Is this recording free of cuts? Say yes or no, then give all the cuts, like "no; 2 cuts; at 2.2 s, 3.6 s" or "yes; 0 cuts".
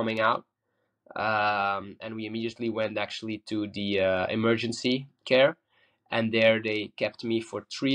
yes; 0 cuts